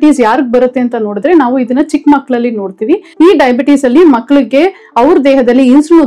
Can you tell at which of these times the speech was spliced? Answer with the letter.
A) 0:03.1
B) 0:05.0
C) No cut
A